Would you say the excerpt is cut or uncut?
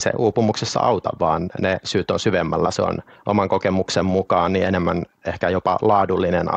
cut